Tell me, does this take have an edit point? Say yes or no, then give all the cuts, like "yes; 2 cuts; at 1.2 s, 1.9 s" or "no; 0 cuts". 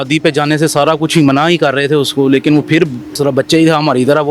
yes; 1 cut; at 3.1 s